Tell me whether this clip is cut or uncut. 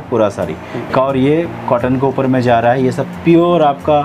cut